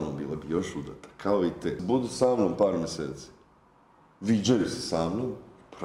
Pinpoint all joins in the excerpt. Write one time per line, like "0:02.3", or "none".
0:01.8